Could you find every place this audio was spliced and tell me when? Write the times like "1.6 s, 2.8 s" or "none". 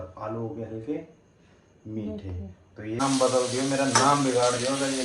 3.0 s